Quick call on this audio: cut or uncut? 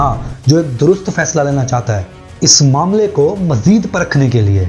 uncut